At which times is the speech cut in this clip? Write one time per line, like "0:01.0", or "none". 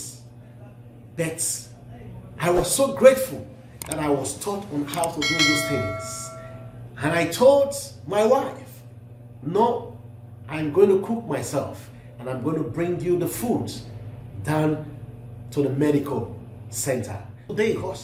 none